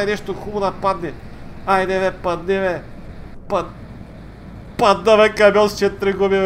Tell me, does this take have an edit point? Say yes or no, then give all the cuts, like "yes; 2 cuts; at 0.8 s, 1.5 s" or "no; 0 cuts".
no; 0 cuts